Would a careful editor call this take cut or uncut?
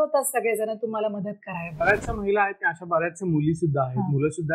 cut